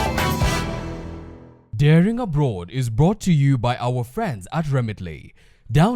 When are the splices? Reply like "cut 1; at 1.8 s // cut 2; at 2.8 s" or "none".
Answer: none